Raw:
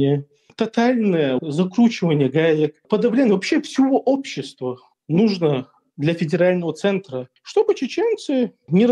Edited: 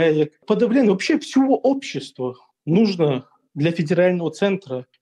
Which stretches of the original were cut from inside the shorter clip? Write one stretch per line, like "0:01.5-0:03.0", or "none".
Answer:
none

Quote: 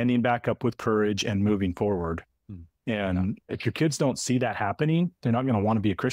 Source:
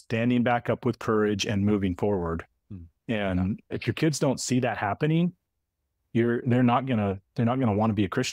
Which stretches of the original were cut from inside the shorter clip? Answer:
0:05.4-0:07.3

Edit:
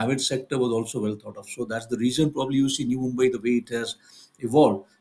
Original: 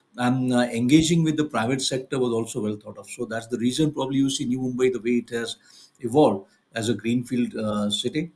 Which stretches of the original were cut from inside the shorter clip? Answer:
none

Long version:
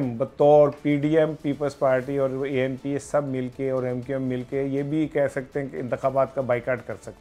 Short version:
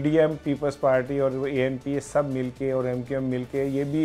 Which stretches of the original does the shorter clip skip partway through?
none

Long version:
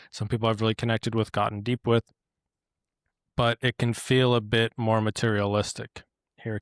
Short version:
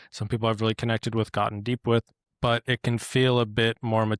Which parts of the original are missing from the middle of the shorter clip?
0:02.2-0:03.2

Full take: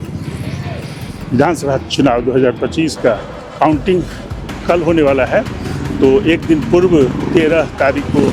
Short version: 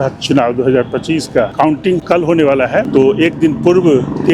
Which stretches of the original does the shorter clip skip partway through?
0:03.4-0:04.3
0:05.5-0:05.9

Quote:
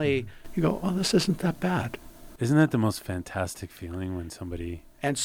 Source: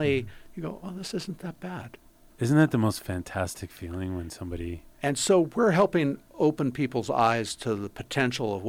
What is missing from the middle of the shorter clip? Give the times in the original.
none

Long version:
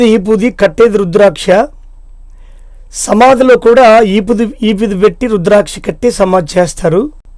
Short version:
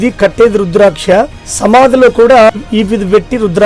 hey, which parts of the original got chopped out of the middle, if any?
0:01.8-0:02.9
0:04.0-0:04.4

